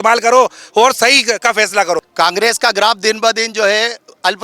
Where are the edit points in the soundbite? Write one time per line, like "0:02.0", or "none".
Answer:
0:02.1